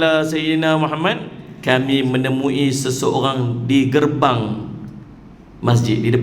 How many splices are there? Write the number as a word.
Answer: one